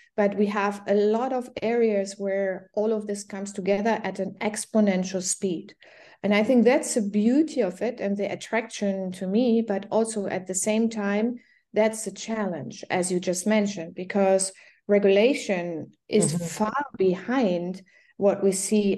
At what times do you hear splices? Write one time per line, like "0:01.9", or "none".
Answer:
none